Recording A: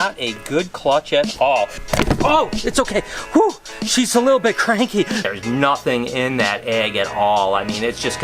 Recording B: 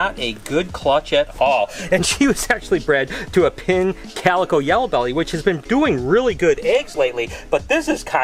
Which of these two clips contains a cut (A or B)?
A